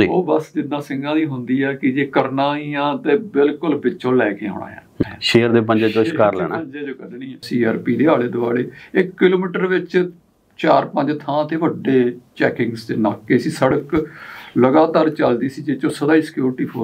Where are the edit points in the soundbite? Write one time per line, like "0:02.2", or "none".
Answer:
0:05.0
0:07.4